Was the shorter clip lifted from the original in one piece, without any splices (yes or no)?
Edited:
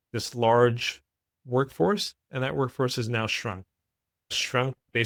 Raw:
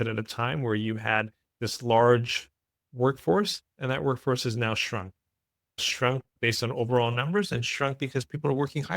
yes